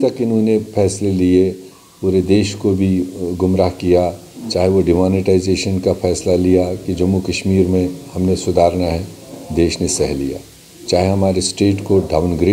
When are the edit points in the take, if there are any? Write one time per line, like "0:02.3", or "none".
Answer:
none